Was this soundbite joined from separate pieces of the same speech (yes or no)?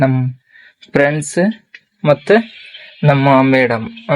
no